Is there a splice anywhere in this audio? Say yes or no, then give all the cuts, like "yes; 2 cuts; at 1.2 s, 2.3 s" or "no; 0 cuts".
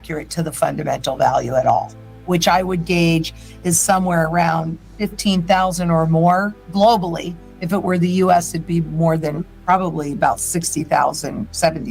no; 0 cuts